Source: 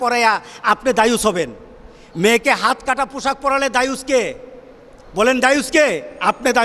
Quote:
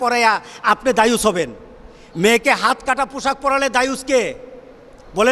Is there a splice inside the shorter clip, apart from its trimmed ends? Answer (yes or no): no